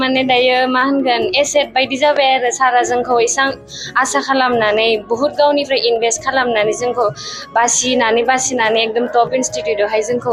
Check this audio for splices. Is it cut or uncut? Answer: uncut